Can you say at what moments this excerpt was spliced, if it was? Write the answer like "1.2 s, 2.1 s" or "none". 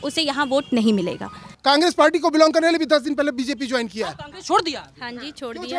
1.5 s